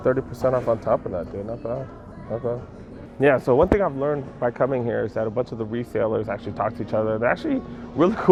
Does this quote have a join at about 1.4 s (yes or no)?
no